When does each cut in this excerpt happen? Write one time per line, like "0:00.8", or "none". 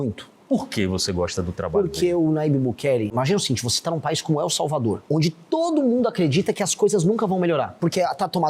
0:03.1
0:05.0
0:07.7